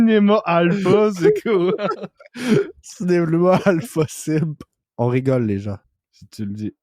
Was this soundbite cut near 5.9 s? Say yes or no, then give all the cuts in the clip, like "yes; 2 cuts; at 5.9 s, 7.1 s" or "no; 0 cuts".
yes; 2 cuts; at 4.8 s, 5.9 s